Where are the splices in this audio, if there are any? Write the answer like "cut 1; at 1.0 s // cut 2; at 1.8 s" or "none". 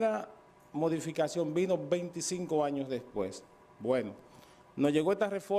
cut 1; at 3.3 s